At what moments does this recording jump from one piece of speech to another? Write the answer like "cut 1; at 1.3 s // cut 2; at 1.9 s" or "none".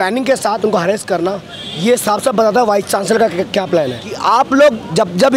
cut 1; at 4.0 s

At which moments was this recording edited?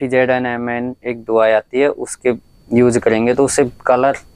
none

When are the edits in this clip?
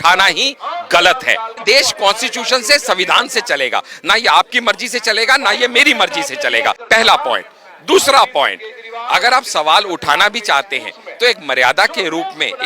cut 1; at 1.6 s // cut 2; at 6.8 s

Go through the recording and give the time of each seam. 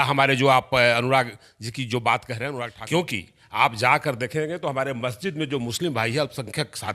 cut 1; at 2.7 s

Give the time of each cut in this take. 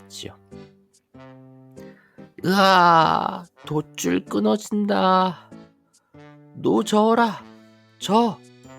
cut 1; at 0.9 s // cut 2; at 2.3 s

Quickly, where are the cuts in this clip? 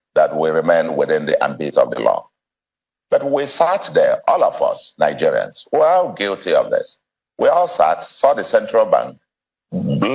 none

